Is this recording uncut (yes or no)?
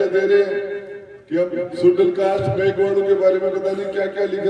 yes